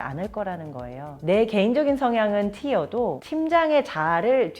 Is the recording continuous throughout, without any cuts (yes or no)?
no